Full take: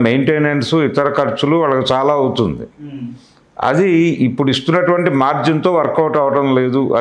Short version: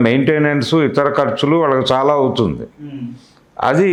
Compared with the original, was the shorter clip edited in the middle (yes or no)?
no